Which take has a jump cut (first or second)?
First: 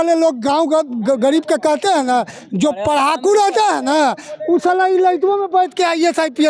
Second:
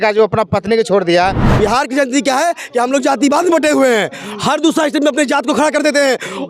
second